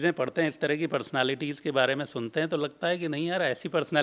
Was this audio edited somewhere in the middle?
no; 0 cuts

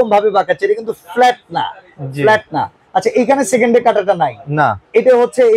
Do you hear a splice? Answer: no; 0 cuts

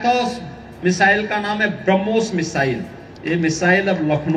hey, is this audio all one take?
yes; 0 cuts

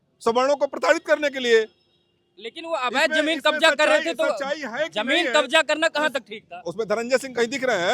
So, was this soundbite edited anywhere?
no; 0 cuts

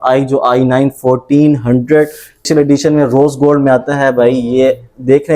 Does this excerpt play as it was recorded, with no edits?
no; 1 cut; at 2.5 s

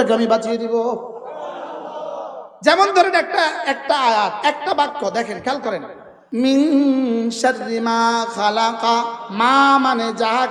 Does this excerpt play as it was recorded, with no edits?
yes; 0 cuts

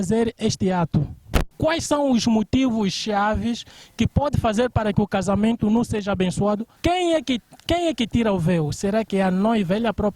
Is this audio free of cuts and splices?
no; 2 cuts; at 1.5 s, 6.7 s

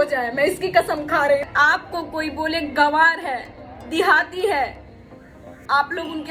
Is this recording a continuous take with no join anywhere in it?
no; 1 cut; at 1.5 s

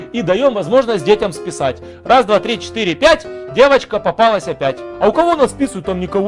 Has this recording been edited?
no; 0 cuts

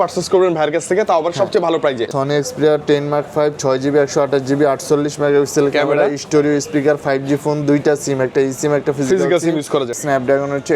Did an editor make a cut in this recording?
yes; 2 cuts; at 2.0 s, 10.0 s

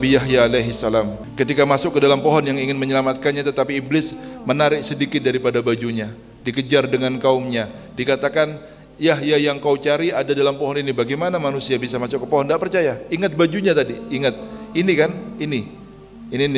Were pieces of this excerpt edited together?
yes; 1 cut; at 1.2 s

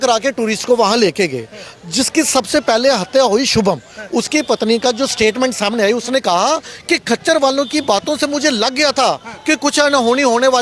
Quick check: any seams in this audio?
no; 0 cuts

